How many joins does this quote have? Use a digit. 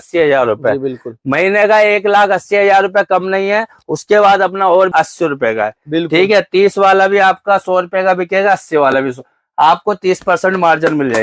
1